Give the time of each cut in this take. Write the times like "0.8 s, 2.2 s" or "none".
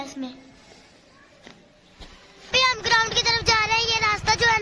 2.5 s